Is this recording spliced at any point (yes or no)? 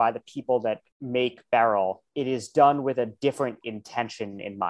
yes